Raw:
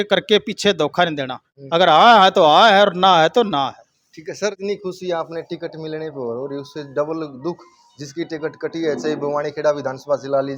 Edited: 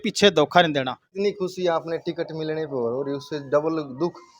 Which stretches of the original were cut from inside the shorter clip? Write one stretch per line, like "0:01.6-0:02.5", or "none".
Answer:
0:01.6-0:04.6